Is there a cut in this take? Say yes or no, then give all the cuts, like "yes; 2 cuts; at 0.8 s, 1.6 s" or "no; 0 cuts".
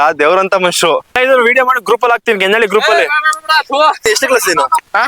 yes; 2 cuts; at 1.1 s, 4.1 s